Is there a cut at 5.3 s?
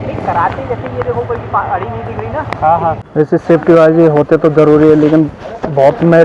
no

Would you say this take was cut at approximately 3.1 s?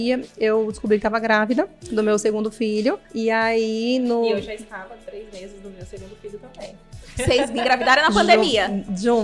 yes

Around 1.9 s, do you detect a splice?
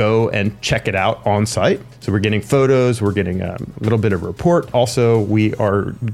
yes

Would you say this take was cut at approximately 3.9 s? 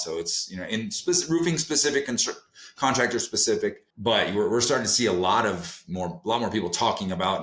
yes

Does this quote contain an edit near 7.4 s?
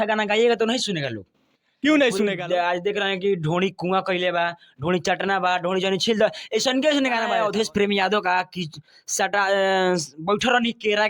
yes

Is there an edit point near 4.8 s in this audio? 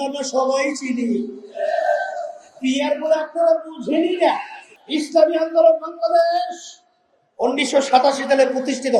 yes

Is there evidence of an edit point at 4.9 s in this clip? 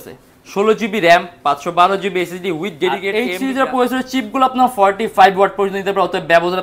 no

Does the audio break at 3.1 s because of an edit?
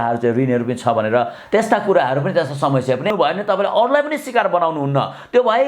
yes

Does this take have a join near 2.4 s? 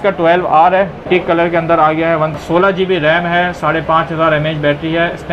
yes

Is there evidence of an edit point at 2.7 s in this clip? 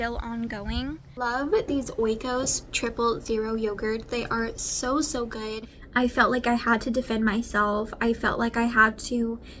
no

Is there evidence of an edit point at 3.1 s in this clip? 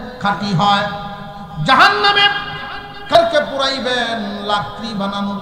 yes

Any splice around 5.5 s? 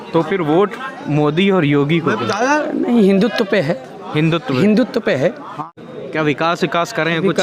yes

